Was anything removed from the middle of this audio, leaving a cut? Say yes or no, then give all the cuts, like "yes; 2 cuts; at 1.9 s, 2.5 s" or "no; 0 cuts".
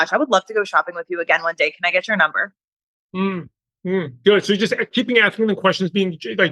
no; 0 cuts